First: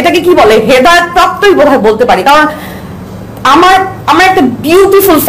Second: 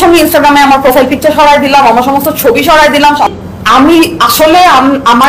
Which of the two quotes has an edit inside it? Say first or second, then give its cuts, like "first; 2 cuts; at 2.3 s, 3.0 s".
second; 1 cut; at 3.3 s